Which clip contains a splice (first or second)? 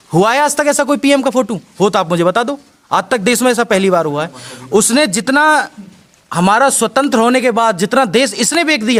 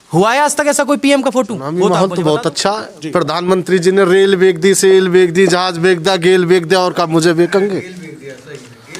second